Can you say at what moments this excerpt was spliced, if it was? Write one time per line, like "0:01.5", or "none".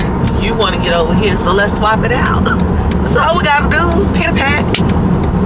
none